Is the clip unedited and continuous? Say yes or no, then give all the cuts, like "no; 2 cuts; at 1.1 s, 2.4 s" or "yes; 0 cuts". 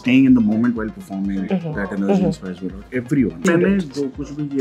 no; 1 cut; at 3.5 s